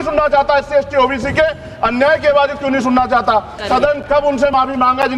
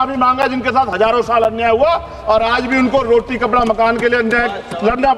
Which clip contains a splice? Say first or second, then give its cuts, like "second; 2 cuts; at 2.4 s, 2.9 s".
first; 1 cut; at 3.6 s